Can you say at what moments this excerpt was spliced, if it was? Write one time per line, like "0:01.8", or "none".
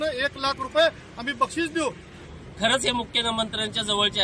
0:02.2